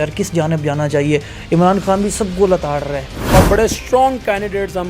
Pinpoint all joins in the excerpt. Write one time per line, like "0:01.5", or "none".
0:03.2